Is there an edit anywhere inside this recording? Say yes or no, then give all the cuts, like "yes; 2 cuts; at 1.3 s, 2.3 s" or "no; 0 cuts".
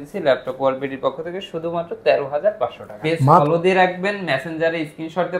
yes; 1 cut; at 3.4 s